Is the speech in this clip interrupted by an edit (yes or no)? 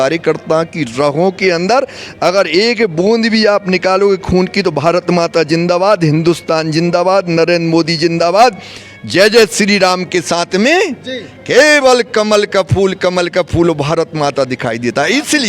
no